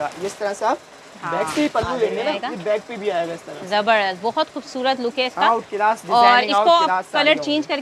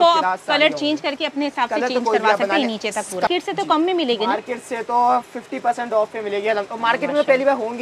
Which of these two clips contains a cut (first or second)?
second